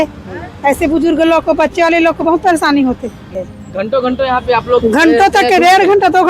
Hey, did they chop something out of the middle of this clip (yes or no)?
yes